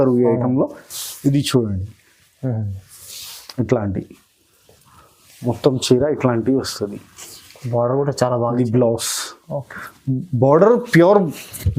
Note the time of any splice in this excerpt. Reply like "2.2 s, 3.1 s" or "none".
none